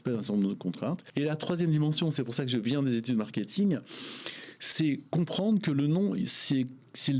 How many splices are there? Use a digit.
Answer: 1